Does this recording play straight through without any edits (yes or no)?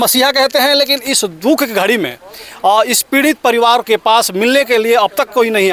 yes